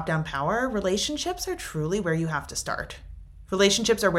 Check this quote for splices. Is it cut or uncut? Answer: uncut